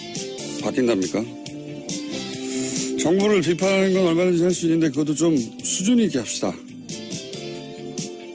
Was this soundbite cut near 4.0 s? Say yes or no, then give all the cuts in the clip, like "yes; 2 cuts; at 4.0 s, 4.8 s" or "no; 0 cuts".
yes; 1 cut; at 4.0 s